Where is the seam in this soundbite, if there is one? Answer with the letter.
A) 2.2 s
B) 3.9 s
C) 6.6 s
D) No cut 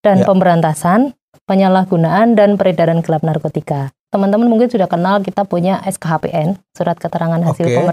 B